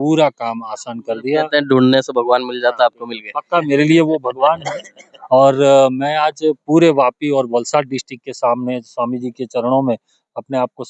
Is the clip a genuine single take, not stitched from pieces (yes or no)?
yes